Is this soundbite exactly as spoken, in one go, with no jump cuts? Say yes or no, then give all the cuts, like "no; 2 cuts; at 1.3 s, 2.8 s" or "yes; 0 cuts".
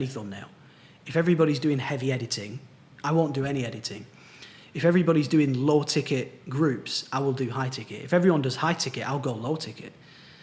yes; 0 cuts